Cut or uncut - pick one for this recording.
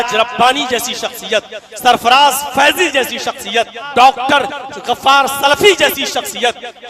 cut